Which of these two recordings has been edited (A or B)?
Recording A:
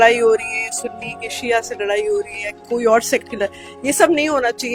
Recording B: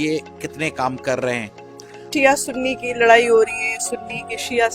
B